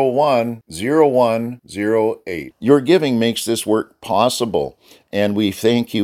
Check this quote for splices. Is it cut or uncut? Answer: uncut